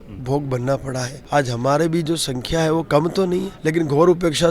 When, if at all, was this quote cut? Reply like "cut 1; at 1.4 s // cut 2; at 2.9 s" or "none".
cut 1; at 1.1 s // cut 2; at 3.5 s